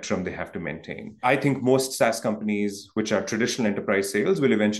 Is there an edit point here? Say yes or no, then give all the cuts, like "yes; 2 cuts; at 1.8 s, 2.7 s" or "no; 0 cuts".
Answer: yes; 1 cut; at 1.2 s